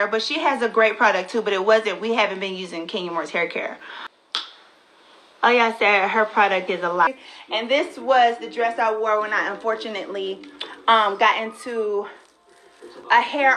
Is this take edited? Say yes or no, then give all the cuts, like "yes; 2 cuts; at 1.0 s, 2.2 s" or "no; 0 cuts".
yes; 2 cuts; at 4.2 s, 7.1 s